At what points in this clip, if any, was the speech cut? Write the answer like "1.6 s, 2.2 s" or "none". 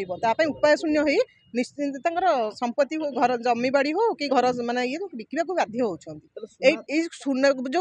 6.8 s